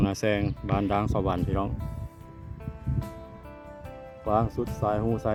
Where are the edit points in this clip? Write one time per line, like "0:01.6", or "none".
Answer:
none